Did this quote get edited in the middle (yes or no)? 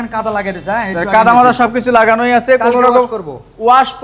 no